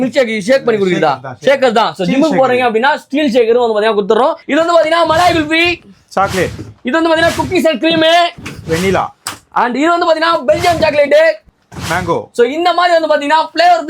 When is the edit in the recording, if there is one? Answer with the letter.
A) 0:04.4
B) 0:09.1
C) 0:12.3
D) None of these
A